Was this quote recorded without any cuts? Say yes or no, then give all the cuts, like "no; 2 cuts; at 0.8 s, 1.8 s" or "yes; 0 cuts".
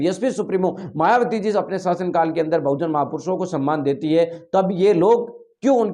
yes; 0 cuts